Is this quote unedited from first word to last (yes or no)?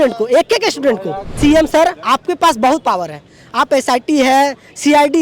no